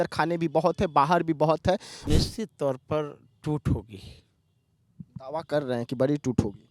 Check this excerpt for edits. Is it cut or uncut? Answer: cut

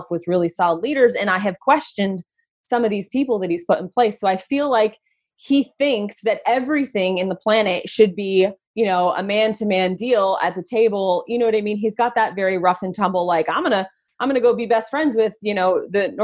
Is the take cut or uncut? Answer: uncut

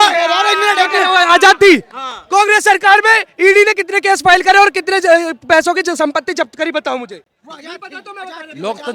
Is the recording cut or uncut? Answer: uncut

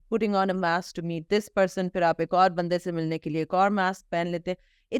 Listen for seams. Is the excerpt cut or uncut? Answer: uncut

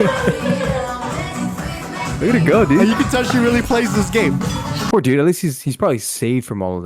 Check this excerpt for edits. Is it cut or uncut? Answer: cut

